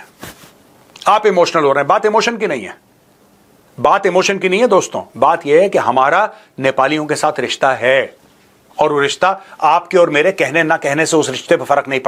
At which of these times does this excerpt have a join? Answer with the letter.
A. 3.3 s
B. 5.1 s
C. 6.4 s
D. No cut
D